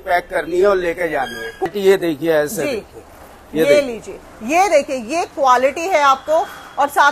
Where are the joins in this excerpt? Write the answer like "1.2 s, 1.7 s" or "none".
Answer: 1.7 s